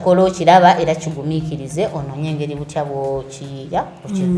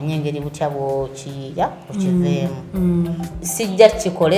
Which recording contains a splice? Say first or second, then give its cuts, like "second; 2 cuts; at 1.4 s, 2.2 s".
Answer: second; 1 cut; at 3.3 s